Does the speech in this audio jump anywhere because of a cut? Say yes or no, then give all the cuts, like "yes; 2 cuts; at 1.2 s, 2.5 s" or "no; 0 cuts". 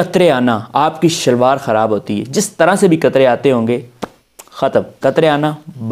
no; 0 cuts